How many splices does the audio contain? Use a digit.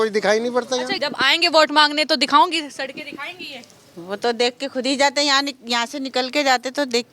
1